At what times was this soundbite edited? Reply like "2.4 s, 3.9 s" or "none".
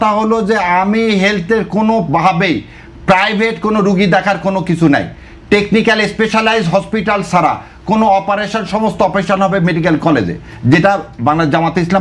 none